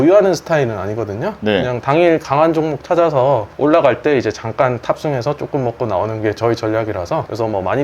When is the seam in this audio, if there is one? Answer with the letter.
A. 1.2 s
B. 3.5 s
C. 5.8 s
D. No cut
D